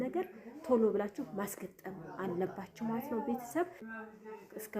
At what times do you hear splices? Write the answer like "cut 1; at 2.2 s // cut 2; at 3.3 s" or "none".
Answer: cut 1; at 3.8 s